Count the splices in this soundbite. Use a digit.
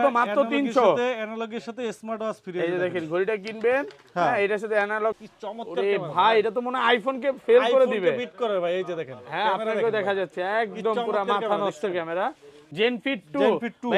2